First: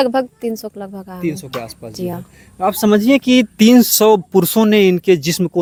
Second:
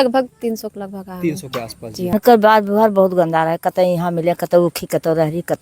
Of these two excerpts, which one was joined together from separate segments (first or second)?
second